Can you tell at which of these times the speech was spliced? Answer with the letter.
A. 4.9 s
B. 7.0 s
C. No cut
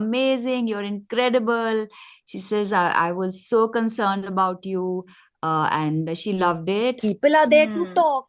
B